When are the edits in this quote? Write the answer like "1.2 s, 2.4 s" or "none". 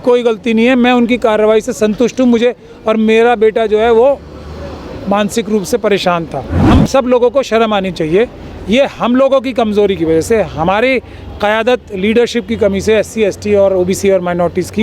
6.6 s